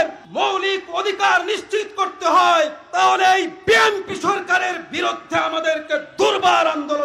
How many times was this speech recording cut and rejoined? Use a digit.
0